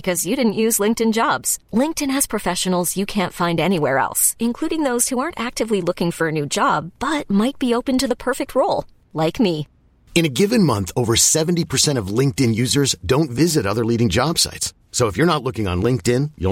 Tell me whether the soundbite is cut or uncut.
uncut